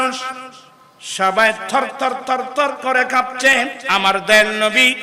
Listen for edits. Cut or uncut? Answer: cut